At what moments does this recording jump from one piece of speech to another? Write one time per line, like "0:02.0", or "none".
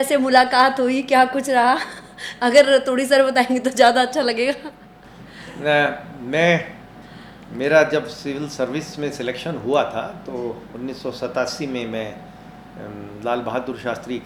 none